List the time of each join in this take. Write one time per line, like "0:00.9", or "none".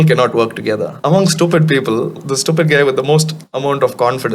0:00.9
0:02.2
0:03.4

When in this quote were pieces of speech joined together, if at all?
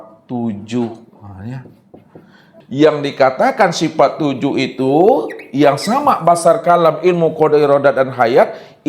0:02.6

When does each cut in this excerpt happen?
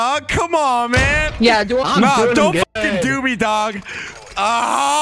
0:01.9

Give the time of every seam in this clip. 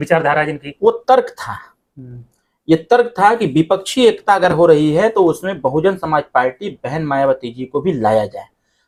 none

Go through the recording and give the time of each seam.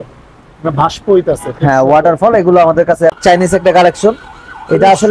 0:03.1

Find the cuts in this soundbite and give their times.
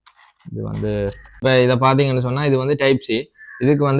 0:01.4

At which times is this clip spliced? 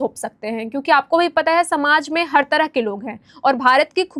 none

